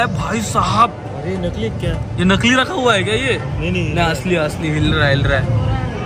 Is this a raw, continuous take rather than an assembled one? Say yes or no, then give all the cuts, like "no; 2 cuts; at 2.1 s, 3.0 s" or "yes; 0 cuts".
yes; 0 cuts